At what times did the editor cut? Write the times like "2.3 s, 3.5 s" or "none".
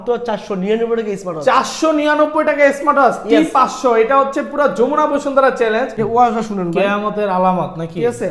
6.0 s